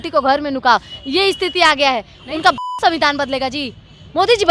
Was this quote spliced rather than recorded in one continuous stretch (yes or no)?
yes